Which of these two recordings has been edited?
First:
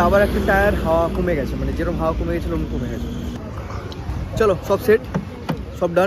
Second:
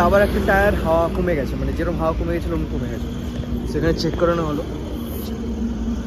first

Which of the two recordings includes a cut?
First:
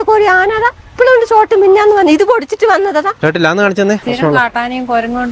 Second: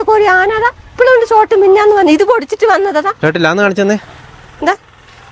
first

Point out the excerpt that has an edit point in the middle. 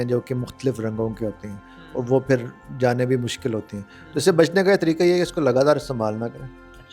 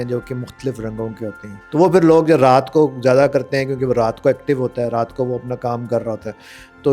second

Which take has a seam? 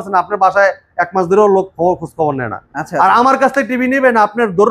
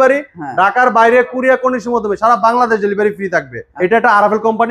second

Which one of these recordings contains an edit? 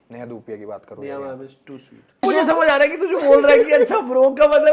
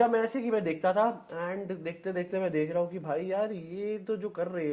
first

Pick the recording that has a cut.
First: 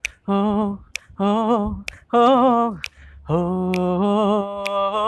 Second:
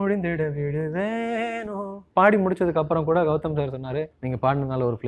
second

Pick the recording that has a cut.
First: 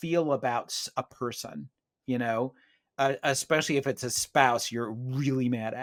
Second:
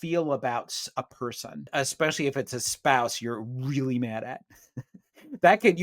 second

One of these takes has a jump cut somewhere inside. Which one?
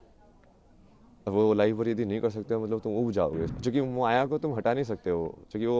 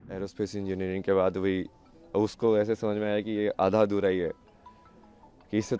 first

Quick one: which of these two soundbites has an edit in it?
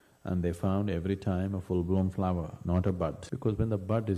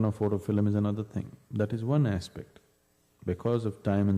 first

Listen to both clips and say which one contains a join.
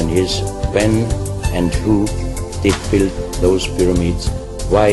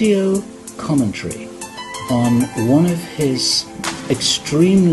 second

